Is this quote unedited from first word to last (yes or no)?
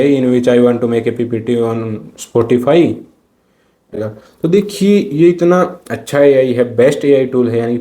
no